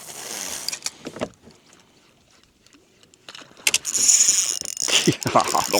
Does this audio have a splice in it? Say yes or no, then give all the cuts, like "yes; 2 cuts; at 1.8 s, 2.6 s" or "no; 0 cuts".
yes; 1 cut; at 1.6 s